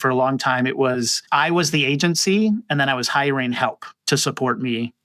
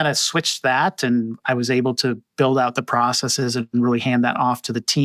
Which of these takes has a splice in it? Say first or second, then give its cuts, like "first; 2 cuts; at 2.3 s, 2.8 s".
first; 1 cut; at 1.2 s